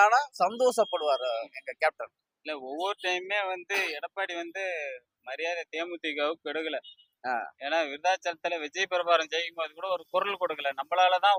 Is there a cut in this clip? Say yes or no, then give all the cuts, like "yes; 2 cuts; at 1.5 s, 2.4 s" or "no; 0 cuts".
no; 0 cuts